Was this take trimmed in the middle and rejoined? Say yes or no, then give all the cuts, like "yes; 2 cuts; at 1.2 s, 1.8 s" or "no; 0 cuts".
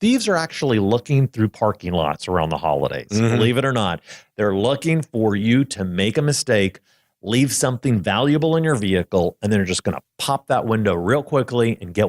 no; 0 cuts